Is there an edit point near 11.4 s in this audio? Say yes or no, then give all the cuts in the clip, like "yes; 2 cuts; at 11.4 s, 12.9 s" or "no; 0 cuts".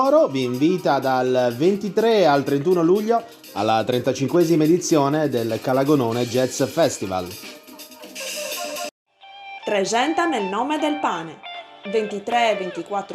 no; 1 cut; at 8.9 s